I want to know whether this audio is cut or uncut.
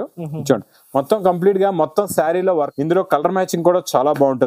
cut